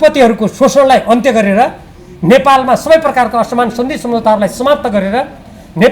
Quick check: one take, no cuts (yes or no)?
yes